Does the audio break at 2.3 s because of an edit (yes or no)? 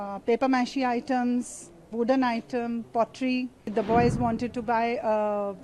no